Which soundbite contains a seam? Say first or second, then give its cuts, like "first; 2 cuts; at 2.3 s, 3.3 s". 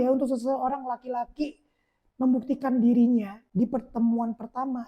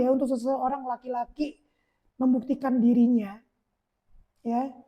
first; 1 cut; at 3.4 s